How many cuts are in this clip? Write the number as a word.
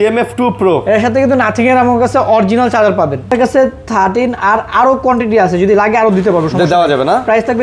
one